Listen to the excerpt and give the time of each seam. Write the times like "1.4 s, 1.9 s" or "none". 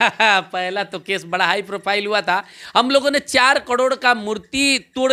none